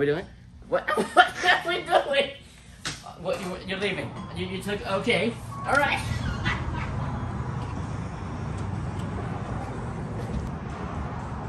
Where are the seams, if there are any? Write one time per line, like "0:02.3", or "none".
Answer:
0:10.5